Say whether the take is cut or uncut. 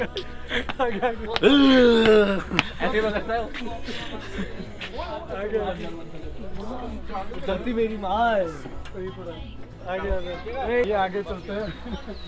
uncut